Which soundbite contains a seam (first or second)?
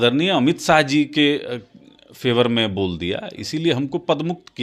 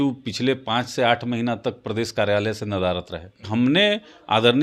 second